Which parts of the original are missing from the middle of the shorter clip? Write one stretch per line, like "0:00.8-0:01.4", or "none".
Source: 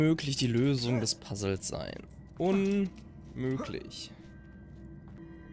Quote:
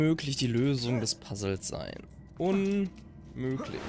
none